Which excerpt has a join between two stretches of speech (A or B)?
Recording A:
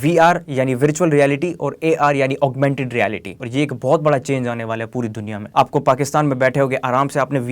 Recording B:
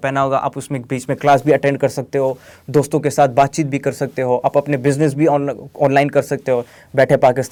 A